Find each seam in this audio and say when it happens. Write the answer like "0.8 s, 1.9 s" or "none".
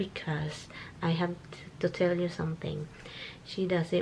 none